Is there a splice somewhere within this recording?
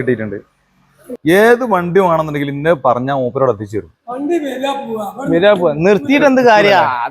yes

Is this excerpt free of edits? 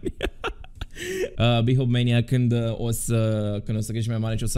no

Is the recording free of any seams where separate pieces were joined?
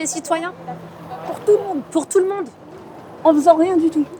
yes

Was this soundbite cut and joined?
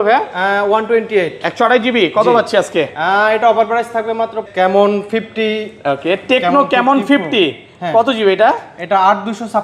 yes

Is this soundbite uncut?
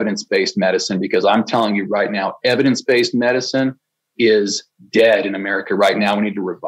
yes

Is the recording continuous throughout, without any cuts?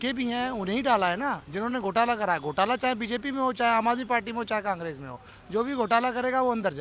yes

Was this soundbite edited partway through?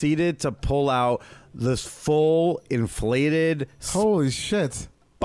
no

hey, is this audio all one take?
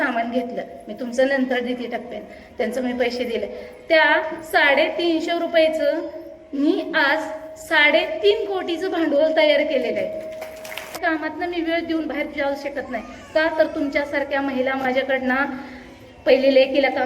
no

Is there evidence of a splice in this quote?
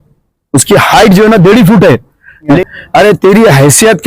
yes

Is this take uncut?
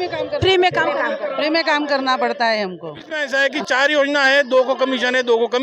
no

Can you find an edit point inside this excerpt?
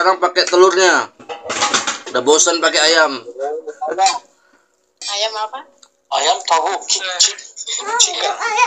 no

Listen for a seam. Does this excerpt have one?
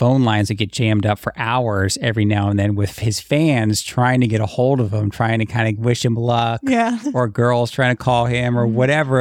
no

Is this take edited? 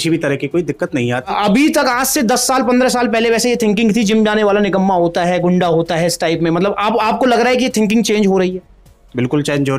yes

